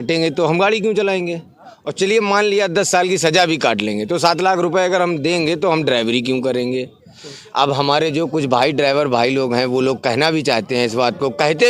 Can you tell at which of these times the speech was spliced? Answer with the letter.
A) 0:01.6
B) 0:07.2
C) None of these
C